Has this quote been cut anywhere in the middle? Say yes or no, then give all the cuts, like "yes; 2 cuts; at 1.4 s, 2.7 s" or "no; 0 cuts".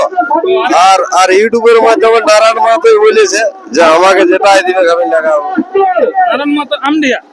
no; 0 cuts